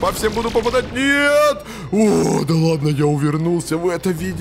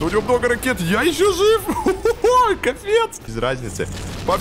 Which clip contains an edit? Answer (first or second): second